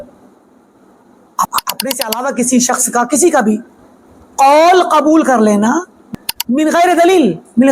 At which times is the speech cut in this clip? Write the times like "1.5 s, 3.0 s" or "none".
1.5 s, 6.0 s